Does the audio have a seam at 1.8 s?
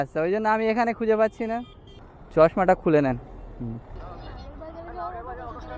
no; 1 cut; at 4.3 s

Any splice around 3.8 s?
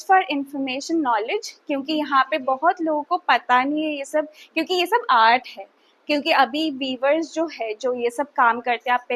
no; 0 cuts

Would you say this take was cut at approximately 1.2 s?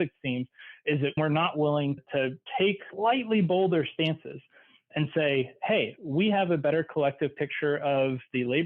yes; 1 cut; at 1.2 s

